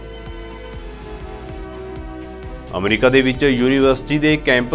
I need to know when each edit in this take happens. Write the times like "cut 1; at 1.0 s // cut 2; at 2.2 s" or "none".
cut 1; at 1.3 s // cut 2; at 2.7 s